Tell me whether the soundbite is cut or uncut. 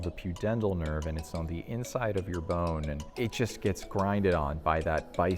cut